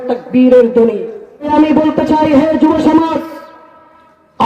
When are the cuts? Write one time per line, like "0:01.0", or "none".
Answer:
0:01.5